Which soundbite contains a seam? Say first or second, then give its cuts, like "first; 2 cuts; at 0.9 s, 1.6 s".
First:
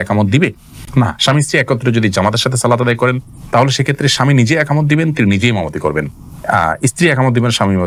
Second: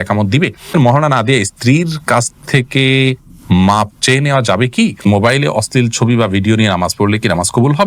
second; 2 cuts; at 0.7 s, 5.0 s